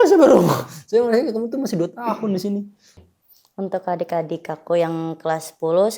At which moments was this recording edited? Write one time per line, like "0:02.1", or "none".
0:02.9